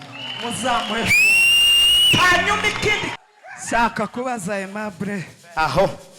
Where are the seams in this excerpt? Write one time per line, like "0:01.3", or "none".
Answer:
0:03.1